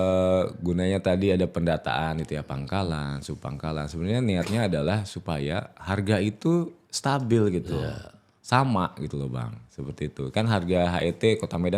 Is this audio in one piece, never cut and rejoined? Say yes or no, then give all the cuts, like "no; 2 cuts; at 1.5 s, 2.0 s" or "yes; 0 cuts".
yes; 0 cuts